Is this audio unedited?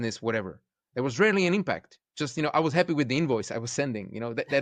yes; 0 cuts

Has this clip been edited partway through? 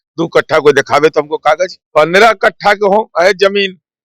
yes; 1 cut; at 1.8 s

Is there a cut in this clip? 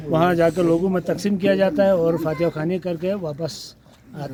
no; 0 cuts

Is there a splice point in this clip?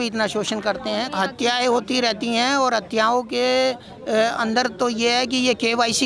yes; 1 cut; at 1.1 s

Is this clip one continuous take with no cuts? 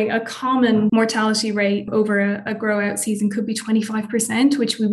no; 2 cuts; at 0.9 s, 1.9 s

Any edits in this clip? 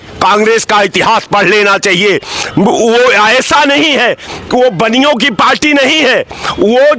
no; 0 cuts

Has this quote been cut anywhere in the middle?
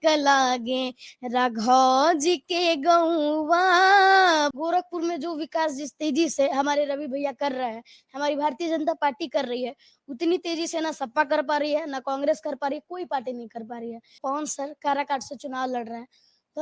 yes; 2 cuts; at 4.5 s, 14.2 s

